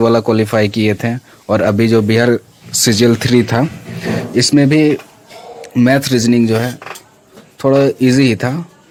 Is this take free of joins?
yes; 0 cuts

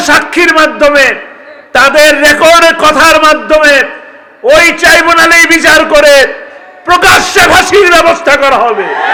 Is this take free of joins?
yes; 0 cuts

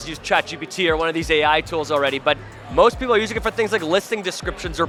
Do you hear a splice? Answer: no; 0 cuts

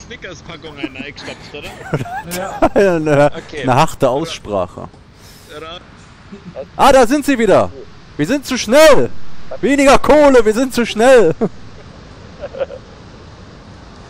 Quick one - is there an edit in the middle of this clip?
yes; 1 cut; at 5.8 s

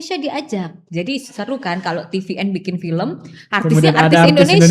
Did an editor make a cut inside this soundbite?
no; 0 cuts

